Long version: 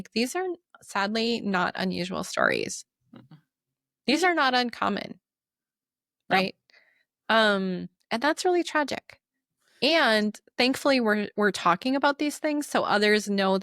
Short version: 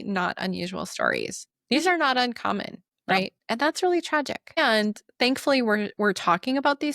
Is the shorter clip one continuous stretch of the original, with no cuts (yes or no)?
no